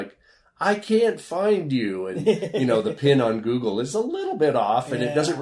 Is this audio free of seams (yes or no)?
yes